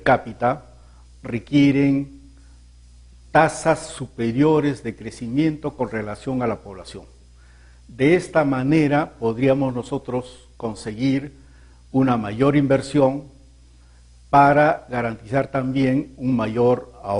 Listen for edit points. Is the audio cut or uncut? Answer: uncut